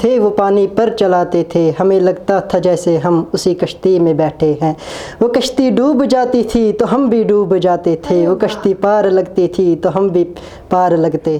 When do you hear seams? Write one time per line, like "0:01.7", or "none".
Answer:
none